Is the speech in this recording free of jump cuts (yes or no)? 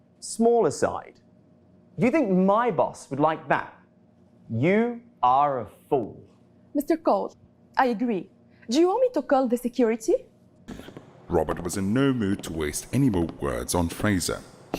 no